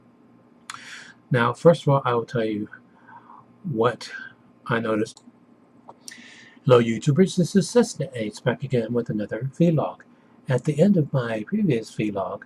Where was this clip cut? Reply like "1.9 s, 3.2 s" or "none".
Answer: none